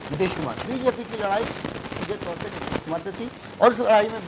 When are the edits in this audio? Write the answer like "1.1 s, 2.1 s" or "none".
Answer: none

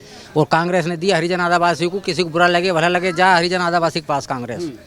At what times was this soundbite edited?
none

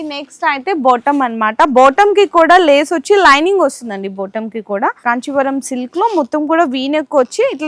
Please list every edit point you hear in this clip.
5.0 s

